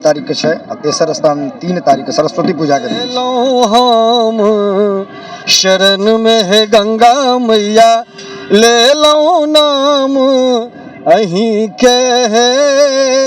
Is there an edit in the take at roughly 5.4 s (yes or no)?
no